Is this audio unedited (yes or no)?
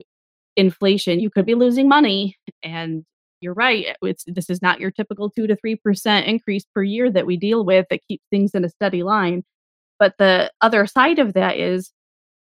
no